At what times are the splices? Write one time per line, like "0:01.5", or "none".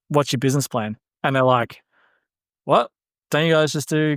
0:01.0
0:03.3